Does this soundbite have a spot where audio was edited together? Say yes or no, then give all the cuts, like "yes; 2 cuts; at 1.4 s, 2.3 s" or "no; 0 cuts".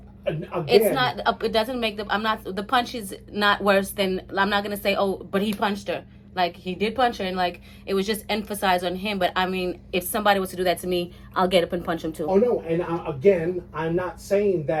no; 0 cuts